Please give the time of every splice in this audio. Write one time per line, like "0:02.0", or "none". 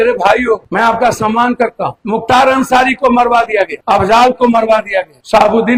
none